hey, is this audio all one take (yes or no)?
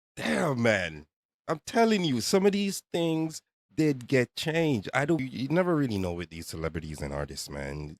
no